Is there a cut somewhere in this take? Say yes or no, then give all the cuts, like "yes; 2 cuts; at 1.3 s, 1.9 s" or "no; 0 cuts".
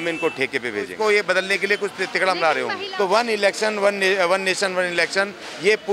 yes; 2 cuts; at 0.9 s, 2.8 s